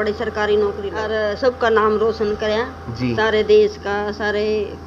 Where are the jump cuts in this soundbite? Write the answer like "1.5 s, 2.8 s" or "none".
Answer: 1.4 s